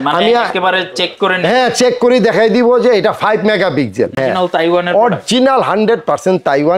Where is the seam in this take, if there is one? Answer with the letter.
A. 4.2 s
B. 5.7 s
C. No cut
A